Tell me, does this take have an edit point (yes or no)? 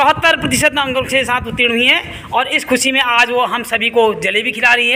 no